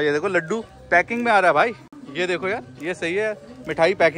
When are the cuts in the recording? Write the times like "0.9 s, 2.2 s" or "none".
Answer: none